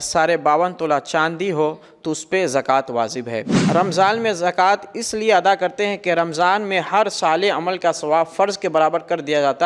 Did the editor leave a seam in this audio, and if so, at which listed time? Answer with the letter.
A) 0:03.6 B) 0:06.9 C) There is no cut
A